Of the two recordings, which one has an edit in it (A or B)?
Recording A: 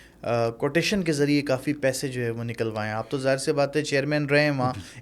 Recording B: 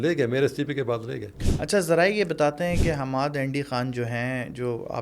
B